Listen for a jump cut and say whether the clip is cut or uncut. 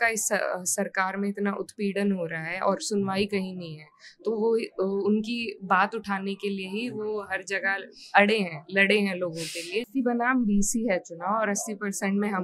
cut